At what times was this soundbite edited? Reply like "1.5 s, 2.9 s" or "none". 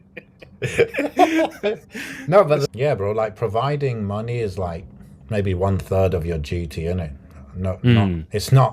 2.6 s